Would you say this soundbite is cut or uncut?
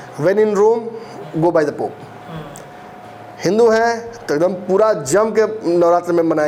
uncut